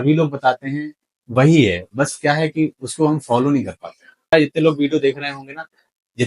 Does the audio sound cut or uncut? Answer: cut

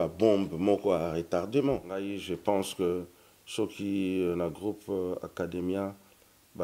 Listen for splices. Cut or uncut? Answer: cut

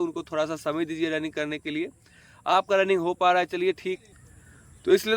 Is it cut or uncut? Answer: cut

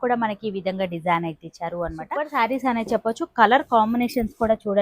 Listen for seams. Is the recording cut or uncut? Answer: cut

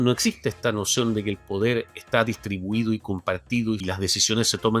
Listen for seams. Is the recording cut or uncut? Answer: cut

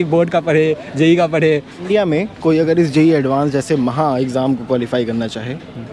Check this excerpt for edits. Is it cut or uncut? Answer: cut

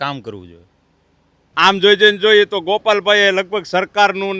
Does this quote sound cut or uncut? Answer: cut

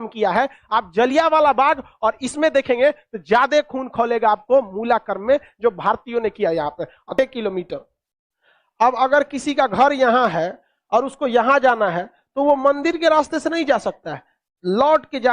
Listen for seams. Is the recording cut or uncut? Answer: cut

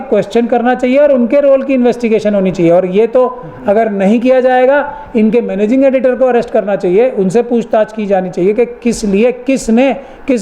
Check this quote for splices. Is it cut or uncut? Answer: uncut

